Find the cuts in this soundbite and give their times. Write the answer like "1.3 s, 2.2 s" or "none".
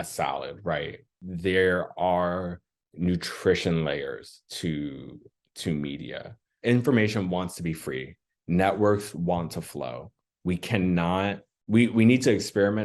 6.4 s